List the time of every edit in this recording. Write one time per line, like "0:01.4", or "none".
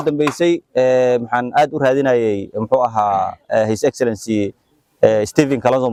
none